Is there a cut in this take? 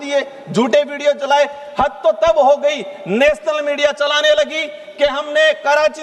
no; 0 cuts

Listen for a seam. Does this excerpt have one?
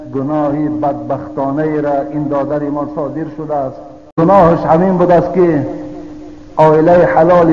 yes; 1 cut; at 4.2 s

